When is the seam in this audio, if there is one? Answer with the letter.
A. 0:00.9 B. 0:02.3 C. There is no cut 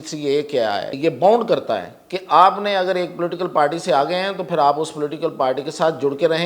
A